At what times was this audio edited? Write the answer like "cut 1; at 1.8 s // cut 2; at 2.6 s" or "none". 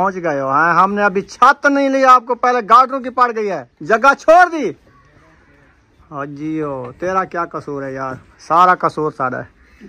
cut 1; at 3.7 s